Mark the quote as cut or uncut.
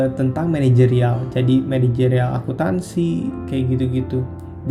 uncut